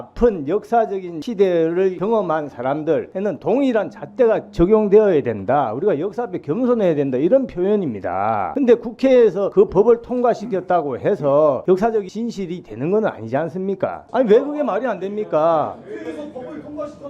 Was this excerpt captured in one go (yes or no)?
no